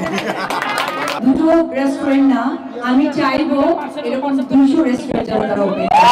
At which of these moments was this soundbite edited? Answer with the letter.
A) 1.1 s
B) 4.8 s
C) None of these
A